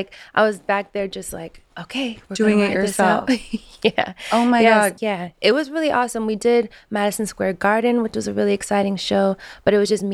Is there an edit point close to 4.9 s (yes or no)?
yes